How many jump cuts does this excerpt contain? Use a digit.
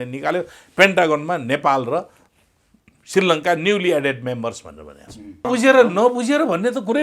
1